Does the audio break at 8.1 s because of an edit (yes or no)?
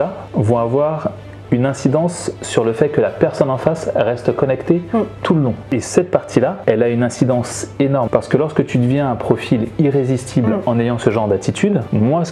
yes